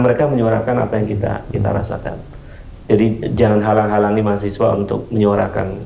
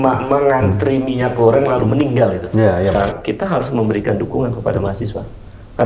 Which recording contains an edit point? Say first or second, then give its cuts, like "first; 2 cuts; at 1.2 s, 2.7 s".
second; 1 cut; at 2.9 s